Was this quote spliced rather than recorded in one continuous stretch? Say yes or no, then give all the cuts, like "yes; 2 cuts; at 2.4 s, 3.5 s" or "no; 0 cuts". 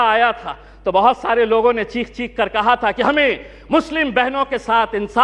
no; 0 cuts